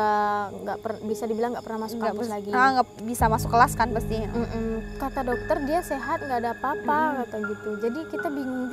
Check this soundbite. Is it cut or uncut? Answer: cut